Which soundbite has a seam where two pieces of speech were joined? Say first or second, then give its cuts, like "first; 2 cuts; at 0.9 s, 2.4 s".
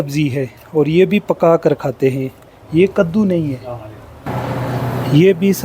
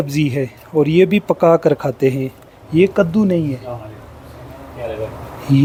first; 1 cut; at 4.3 s